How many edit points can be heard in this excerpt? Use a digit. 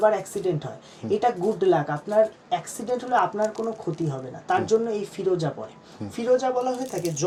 0